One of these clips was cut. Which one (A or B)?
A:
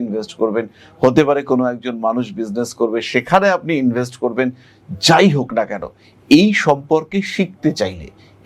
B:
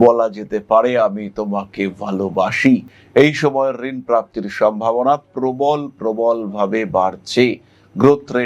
B